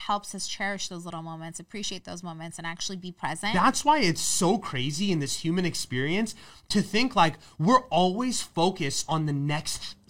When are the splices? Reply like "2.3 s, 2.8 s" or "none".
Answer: 3.4 s